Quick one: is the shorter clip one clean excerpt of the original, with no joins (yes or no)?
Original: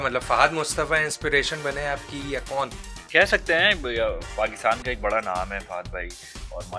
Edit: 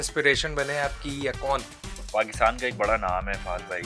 no